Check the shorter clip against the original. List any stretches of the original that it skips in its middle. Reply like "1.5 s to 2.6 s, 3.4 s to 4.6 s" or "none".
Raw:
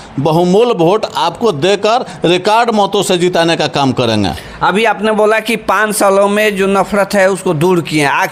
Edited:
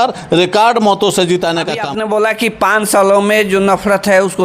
3.7 s to 4.9 s